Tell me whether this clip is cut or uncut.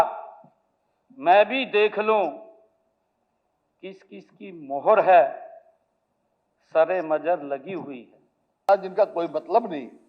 cut